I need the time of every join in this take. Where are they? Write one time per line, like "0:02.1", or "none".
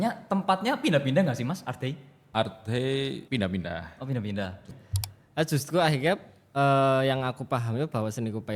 0:02.1
0:03.2
0:04.6